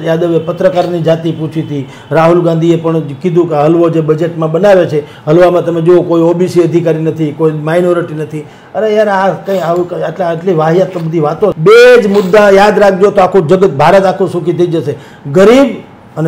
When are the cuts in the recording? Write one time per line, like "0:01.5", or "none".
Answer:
0:11.6